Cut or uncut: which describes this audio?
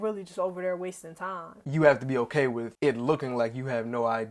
cut